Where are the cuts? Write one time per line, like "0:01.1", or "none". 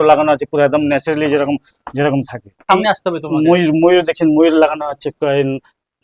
0:02.6